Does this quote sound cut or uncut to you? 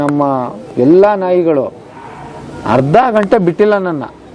uncut